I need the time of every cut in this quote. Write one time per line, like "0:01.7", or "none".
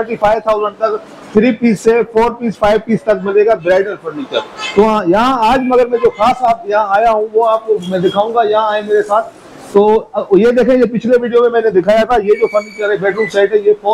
none